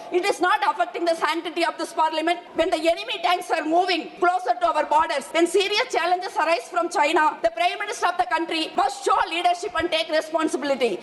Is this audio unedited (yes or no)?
no